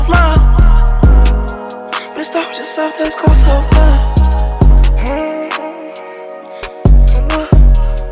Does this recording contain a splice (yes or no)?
no